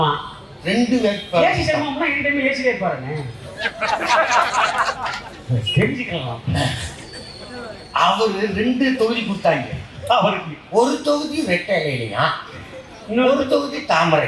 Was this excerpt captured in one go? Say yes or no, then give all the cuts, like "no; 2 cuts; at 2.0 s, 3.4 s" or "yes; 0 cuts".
yes; 0 cuts